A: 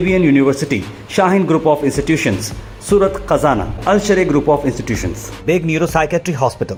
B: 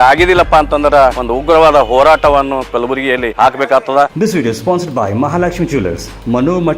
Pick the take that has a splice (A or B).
B